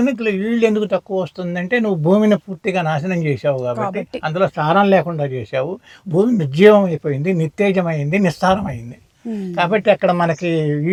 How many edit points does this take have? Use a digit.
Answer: 0